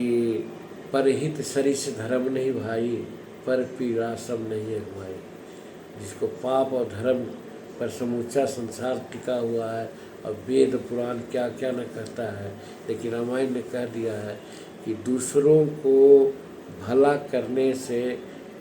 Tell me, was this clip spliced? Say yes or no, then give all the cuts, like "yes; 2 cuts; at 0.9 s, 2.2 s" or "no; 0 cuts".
no; 0 cuts